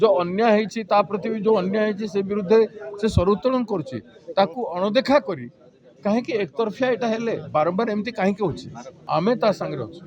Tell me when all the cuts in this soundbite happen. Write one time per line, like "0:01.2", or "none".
0:08.9